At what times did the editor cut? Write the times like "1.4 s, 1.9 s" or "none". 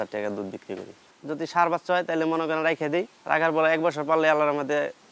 1.0 s, 3.2 s